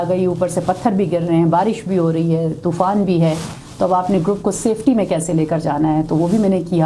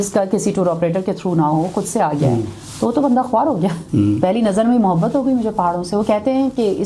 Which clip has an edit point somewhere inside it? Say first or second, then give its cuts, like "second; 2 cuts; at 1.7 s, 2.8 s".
second; 1 cut; at 3.8 s